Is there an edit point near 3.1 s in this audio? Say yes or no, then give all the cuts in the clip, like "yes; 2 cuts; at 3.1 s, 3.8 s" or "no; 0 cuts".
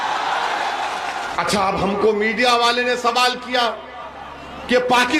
no; 1 cut; at 1.3 s